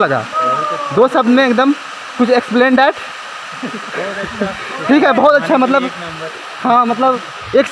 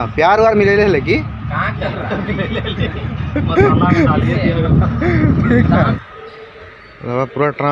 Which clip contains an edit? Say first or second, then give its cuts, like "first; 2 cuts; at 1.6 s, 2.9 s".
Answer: second; 1 cut; at 6.0 s